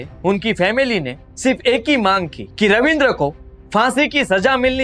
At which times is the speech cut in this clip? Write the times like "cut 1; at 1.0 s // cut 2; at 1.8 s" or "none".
none